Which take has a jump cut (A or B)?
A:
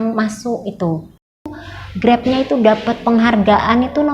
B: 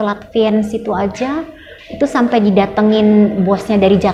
A